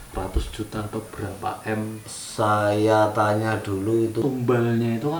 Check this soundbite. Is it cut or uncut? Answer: cut